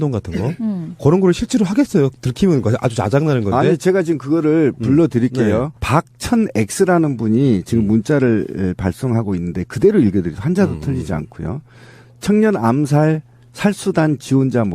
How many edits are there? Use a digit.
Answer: 1